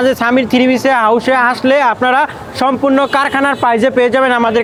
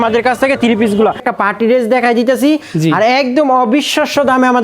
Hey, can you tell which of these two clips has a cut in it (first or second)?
second